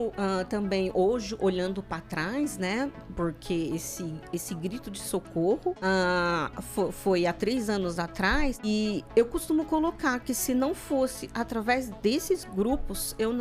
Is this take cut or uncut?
cut